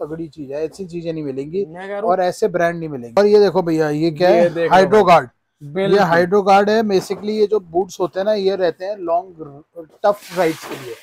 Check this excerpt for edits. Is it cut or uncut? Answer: cut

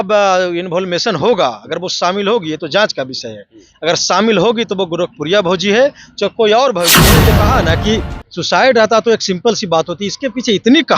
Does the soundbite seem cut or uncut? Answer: cut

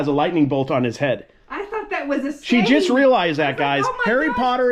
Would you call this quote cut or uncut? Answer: uncut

